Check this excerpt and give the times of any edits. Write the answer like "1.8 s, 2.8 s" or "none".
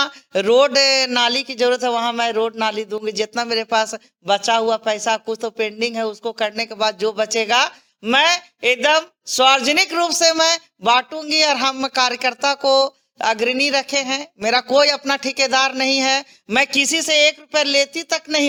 none